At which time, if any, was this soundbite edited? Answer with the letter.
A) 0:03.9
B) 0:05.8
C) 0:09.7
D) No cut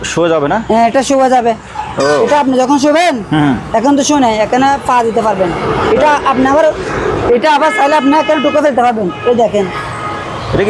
D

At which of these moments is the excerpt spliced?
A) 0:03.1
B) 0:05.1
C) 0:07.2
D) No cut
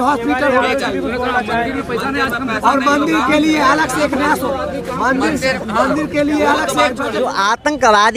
C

